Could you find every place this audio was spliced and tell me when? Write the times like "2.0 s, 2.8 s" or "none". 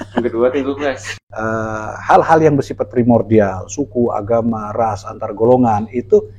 1.0 s